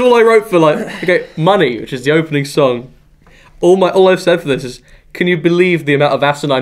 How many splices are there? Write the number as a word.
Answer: one